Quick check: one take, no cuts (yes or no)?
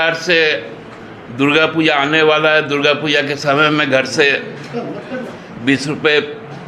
yes